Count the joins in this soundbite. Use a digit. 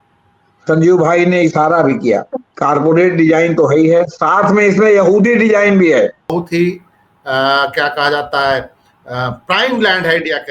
1